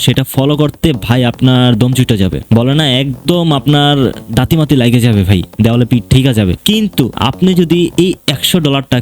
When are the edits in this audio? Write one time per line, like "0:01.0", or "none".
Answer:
0:02.4
0:06.9